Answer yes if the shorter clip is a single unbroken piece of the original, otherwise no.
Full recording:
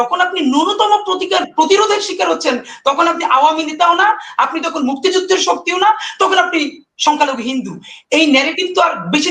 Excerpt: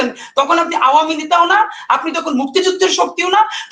yes